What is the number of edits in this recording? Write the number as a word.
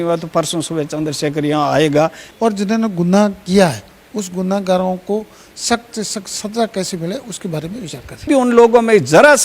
two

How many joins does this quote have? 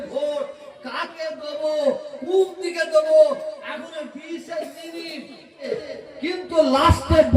one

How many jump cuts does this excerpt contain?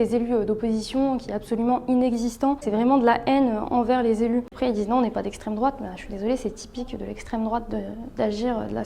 two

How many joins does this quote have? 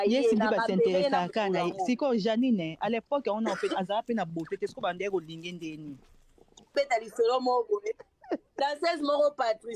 one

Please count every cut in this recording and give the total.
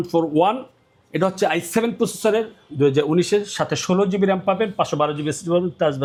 zero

